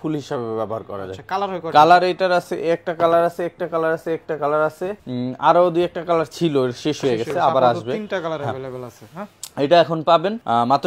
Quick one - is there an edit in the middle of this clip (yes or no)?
no